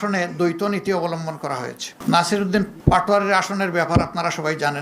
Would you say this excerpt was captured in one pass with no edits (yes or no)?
no